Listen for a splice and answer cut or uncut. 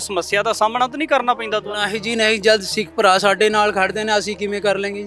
uncut